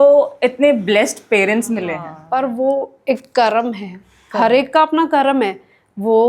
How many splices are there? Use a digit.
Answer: 1